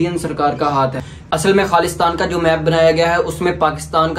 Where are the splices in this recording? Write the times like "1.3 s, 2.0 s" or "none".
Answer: 1.0 s